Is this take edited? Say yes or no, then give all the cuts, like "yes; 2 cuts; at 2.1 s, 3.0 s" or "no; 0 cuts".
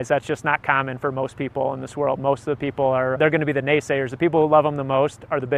yes; 1 cut; at 3.2 s